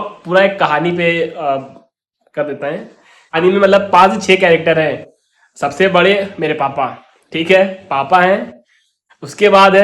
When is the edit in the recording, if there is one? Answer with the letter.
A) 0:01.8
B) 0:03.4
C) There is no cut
B